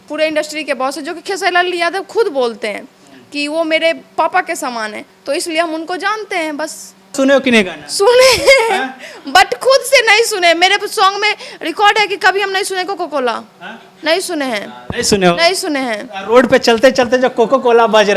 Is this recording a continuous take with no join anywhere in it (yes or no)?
no